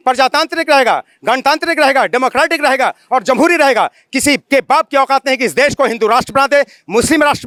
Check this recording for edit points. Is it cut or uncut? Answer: uncut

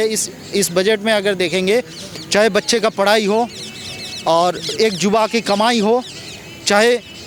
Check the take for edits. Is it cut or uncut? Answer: uncut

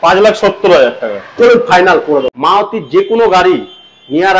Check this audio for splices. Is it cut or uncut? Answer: cut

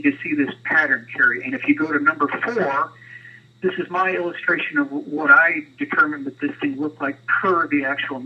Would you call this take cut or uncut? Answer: uncut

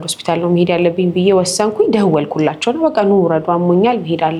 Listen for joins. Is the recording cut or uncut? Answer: uncut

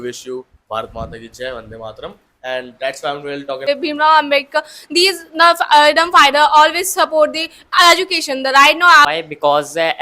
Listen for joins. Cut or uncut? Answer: cut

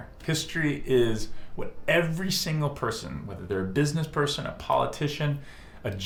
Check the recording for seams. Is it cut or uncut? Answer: uncut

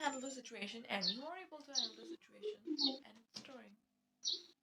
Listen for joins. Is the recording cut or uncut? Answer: uncut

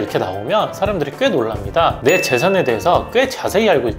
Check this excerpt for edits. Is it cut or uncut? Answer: uncut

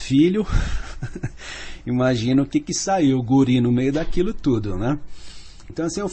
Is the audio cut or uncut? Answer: uncut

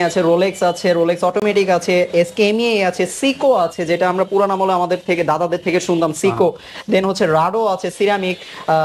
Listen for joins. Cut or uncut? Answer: uncut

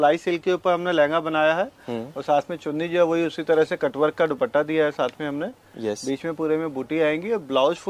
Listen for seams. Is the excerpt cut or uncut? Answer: uncut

